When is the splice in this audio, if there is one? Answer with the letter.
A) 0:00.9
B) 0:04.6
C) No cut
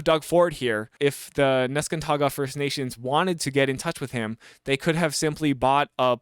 A